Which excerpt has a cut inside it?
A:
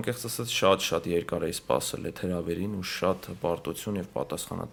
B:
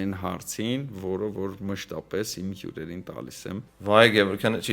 B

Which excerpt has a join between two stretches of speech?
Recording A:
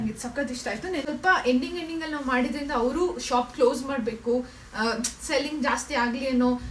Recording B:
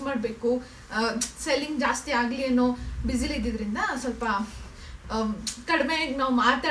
A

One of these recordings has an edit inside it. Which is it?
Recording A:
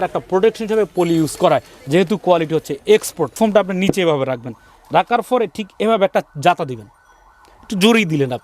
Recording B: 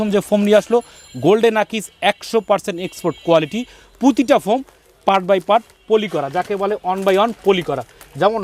A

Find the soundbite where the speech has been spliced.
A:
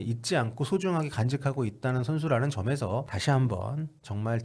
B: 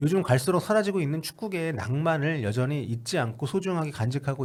A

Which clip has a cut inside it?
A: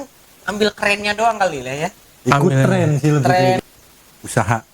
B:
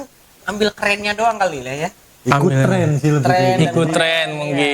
A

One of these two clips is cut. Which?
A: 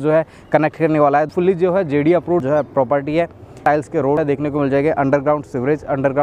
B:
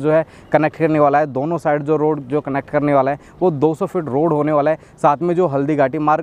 A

